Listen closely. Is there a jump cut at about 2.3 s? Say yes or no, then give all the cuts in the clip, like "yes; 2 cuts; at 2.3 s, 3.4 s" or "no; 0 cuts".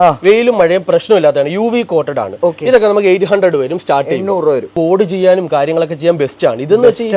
no; 0 cuts